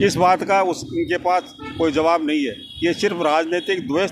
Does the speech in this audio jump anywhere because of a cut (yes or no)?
no